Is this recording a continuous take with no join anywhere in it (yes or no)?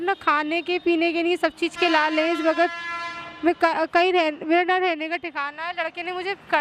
yes